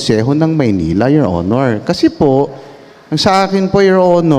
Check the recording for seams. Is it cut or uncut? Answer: uncut